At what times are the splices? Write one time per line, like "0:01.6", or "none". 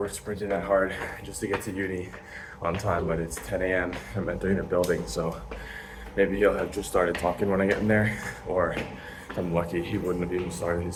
none